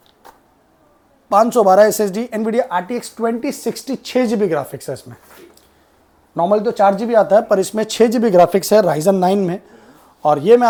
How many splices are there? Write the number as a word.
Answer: zero